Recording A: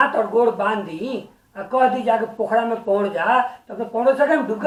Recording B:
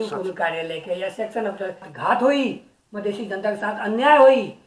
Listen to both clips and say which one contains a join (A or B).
B